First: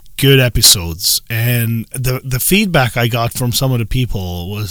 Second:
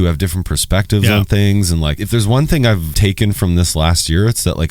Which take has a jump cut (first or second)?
second